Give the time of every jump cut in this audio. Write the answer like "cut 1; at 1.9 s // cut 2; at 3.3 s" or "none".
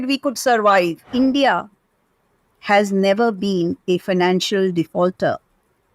cut 1; at 1.1 s